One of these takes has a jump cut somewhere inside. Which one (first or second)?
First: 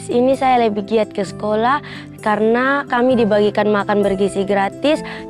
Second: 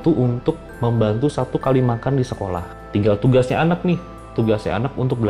second